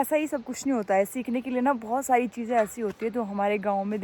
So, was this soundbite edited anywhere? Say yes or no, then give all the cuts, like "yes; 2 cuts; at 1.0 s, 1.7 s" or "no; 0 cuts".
no; 0 cuts